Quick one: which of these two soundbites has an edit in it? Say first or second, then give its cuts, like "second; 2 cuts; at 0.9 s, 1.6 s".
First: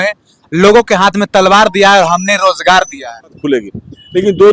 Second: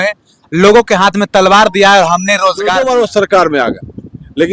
second; 1 cut; at 2.7 s